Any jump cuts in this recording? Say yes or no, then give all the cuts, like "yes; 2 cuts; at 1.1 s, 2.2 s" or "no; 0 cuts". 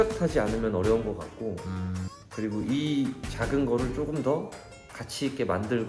no; 0 cuts